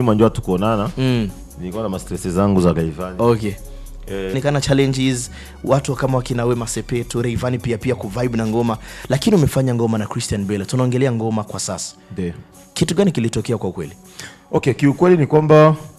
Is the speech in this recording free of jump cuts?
no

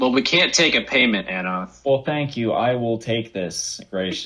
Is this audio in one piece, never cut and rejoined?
yes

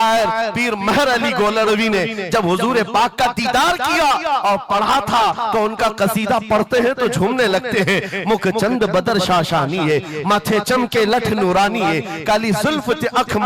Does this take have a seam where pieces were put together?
no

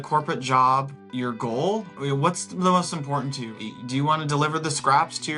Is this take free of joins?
no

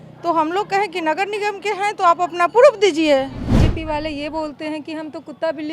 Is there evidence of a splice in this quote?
yes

